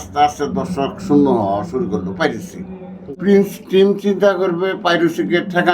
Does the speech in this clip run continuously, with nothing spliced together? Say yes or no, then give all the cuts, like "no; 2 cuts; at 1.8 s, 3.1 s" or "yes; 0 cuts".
no; 1 cut; at 3.0 s